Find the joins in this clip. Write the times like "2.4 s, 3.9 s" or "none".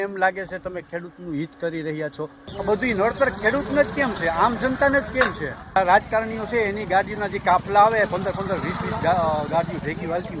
2.5 s, 5.5 s